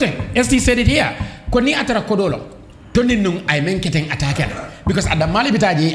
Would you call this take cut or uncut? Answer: uncut